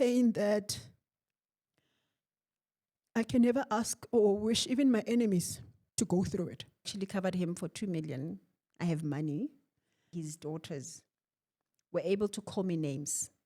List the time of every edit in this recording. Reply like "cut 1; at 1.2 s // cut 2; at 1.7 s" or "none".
cut 1; at 6.9 s // cut 2; at 10.1 s